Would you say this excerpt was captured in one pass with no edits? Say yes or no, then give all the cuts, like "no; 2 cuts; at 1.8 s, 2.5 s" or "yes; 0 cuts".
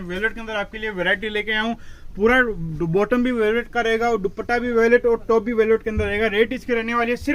yes; 0 cuts